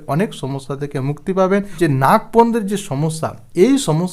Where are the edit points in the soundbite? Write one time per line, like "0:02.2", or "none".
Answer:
0:01.8